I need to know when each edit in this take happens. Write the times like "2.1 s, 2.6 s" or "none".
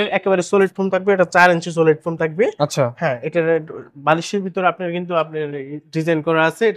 none